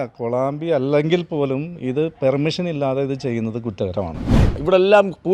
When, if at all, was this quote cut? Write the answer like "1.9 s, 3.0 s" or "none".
4.4 s